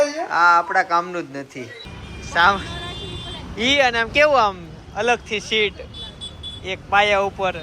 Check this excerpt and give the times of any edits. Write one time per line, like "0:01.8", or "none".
0:01.8